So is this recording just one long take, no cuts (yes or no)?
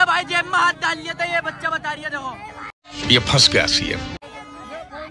yes